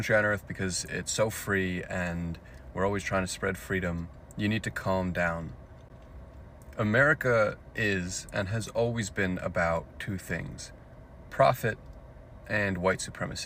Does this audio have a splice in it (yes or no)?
no